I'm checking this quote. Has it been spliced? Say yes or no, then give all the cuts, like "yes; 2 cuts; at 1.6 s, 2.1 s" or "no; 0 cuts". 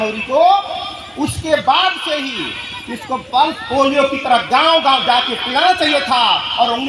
no; 0 cuts